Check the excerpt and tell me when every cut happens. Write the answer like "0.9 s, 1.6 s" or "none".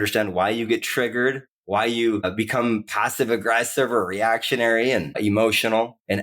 1.5 s, 2.3 s, 5.2 s